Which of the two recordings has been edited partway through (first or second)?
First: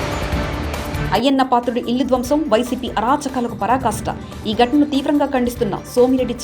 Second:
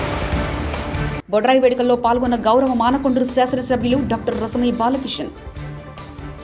first